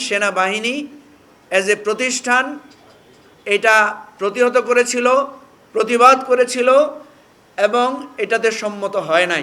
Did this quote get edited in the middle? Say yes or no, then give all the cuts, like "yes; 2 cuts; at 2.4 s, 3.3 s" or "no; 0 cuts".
no; 0 cuts